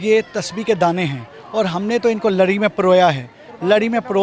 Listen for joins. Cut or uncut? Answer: uncut